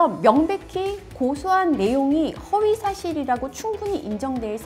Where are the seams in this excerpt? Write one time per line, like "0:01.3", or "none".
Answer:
none